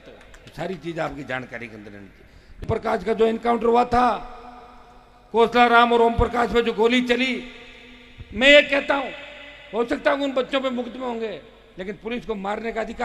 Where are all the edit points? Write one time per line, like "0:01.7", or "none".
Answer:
0:02.6